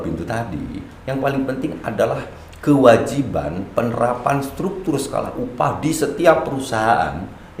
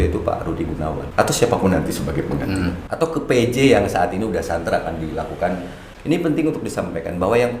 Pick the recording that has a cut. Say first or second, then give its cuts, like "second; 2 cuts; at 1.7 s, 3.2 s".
second; 3 cuts; at 1.0 s, 2.8 s, 5.9 s